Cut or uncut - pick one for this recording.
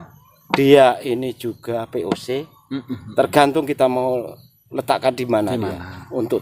uncut